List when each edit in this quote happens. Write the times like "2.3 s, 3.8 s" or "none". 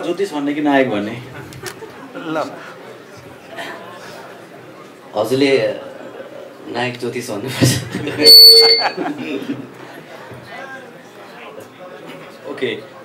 none